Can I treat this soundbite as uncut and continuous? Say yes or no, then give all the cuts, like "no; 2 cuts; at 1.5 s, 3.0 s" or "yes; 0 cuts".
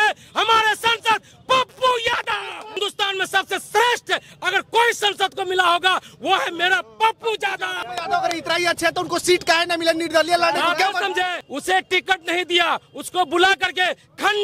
no; 3 cuts; at 2.8 s, 7.7 s, 11.5 s